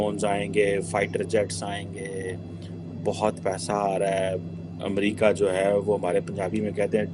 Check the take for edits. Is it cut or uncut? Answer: uncut